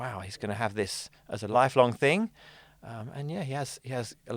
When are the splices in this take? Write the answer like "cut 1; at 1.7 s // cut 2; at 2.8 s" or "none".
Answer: cut 1; at 1.4 s